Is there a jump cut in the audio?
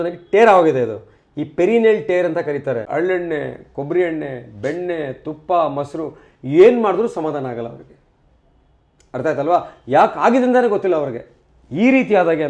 yes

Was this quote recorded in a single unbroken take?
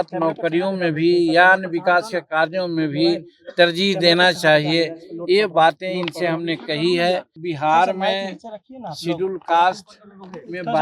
no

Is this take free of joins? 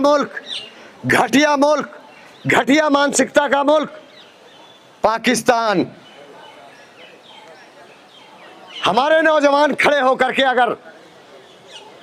yes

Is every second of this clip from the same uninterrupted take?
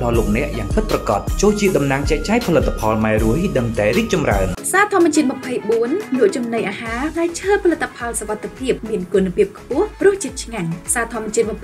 no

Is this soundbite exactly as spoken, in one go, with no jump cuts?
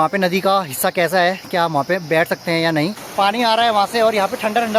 no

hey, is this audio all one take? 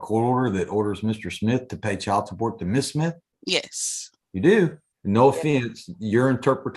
no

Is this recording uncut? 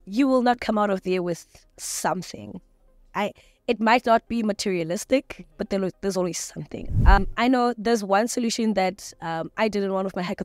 no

